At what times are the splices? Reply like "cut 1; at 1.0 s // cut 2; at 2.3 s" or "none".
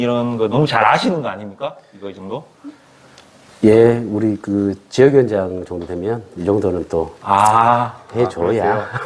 none